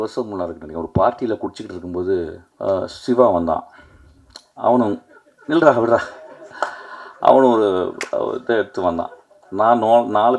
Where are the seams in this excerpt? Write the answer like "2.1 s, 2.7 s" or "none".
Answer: 2.4 s